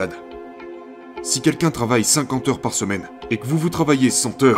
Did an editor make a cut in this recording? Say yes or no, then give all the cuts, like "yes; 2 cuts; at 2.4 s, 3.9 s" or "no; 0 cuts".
yes; 2 cuts; at 0.8 s, 3.1 s